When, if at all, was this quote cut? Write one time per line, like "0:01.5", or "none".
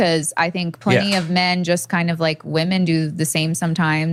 none